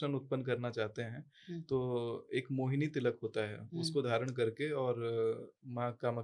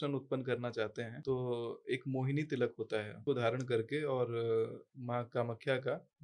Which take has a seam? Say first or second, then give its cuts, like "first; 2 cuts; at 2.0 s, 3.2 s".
second; 2 cuts; at 1.1 s, 3.2 s